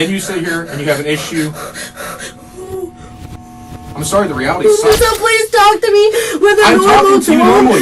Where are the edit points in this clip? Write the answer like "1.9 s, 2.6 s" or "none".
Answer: 5.1 s